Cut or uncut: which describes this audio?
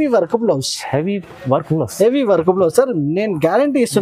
uncut